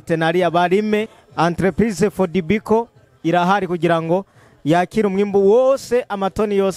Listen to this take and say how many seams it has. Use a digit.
1